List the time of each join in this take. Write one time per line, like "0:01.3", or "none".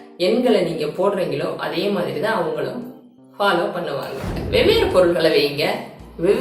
0:04.3